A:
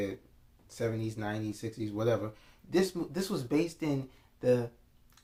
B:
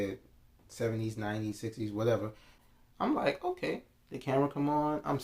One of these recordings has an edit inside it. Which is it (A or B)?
B